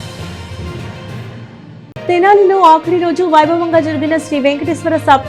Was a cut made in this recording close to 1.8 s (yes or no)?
no